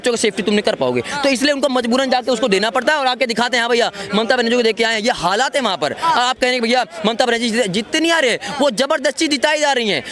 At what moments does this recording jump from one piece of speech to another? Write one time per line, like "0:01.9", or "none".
none